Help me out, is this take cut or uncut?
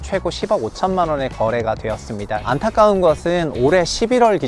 cut